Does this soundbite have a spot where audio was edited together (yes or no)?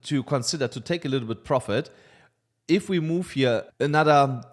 no